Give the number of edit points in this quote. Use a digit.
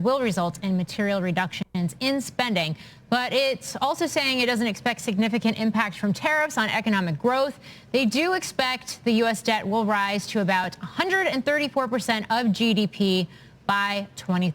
2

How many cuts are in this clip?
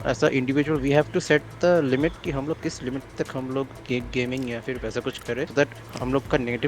1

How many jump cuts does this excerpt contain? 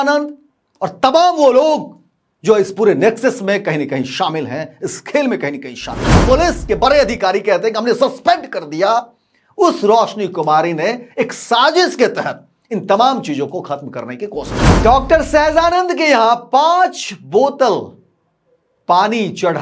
2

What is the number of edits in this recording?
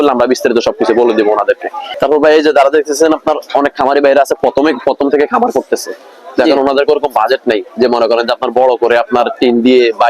0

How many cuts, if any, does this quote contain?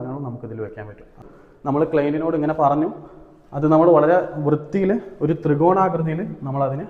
1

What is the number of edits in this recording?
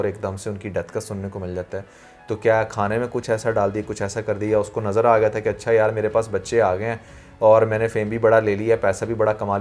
0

